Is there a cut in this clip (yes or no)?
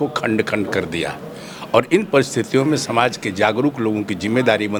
no